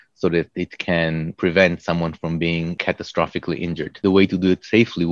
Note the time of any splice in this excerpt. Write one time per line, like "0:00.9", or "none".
0:01.3
0:02.8
0:04.0